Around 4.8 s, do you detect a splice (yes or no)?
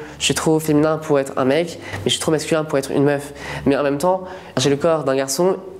no